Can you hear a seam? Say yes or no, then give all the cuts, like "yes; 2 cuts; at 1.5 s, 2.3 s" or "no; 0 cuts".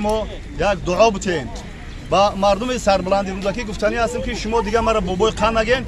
no; 0 cuts